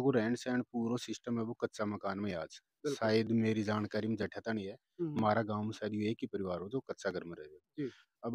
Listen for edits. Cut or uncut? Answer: uncut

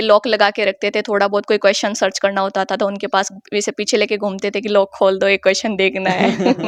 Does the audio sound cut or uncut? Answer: uncut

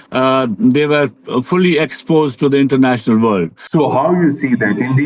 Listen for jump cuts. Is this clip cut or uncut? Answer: cut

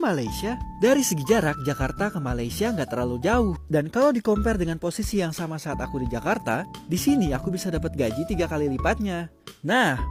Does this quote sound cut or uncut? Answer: uncut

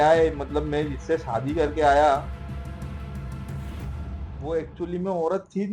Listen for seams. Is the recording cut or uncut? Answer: uncut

